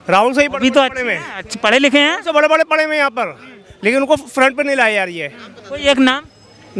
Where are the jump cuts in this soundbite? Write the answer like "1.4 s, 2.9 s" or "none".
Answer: none